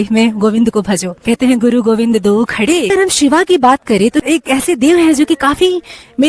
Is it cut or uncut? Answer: cut